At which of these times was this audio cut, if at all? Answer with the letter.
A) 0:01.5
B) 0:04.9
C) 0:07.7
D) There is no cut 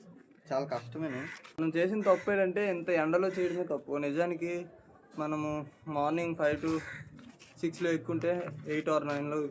A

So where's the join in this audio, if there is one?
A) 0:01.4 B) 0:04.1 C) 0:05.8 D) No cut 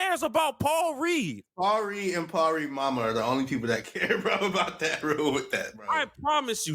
A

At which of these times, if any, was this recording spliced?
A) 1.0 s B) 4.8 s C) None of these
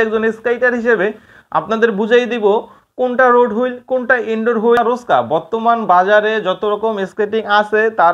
B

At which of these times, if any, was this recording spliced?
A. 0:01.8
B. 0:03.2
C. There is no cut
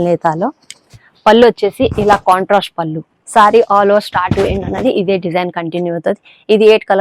B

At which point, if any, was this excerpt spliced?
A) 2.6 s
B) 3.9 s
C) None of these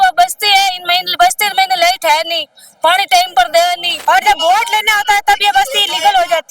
B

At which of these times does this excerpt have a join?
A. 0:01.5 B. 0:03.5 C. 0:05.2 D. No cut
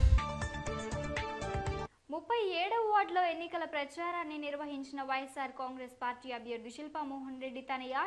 D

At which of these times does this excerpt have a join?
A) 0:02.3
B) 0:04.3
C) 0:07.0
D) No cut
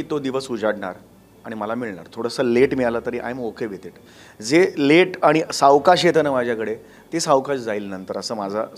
D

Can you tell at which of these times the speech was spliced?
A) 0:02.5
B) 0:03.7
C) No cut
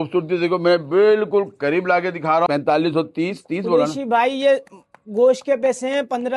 A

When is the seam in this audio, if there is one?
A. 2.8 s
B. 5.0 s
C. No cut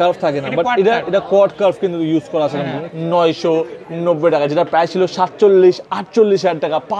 A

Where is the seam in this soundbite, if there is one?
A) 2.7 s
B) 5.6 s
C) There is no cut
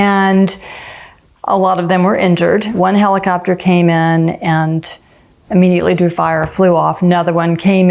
A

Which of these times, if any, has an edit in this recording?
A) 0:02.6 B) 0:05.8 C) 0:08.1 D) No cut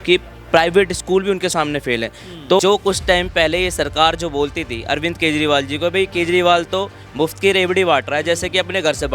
A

